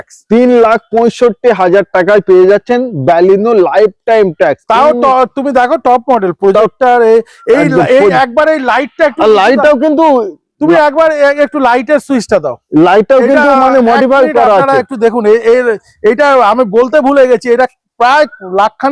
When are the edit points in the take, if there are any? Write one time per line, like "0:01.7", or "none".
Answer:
none

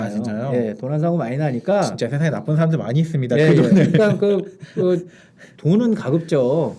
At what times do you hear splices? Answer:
none

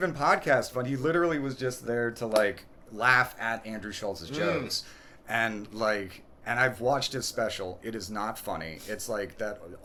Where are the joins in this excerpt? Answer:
none

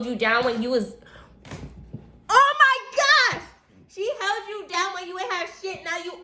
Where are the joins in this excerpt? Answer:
none

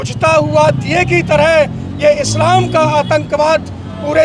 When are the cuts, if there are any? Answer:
none

